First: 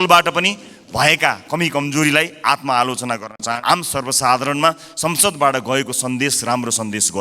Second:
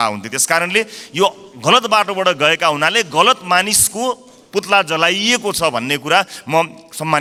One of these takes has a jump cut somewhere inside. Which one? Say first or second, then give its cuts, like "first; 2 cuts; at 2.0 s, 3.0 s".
first; 1 cut; at 3.5 s